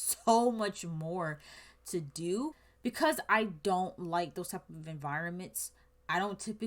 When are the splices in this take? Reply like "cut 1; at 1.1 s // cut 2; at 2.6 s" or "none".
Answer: cut 1; at 2.7 s

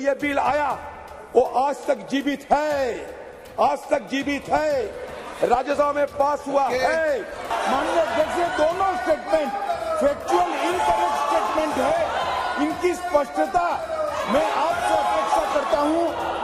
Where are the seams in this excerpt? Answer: cut 1; at 7.5 s

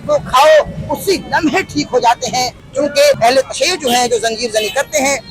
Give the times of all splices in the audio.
cut 1; at 2.9 s

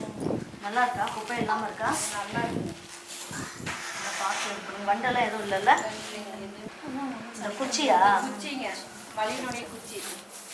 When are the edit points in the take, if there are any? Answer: cut 1; at 6.6 s

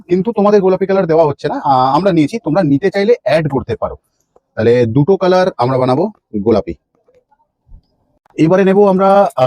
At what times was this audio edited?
none

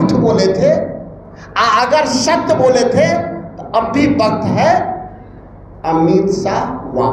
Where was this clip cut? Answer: none

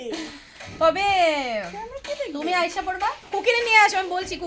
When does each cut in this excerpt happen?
none

